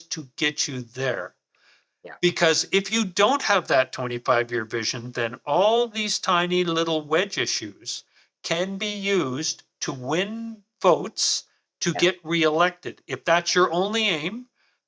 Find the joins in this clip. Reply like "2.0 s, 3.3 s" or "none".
none